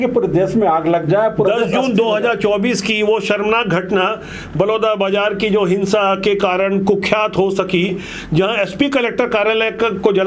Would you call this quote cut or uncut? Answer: uncut